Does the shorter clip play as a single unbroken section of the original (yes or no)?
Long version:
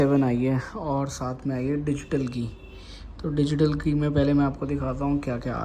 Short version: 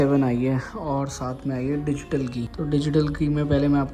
no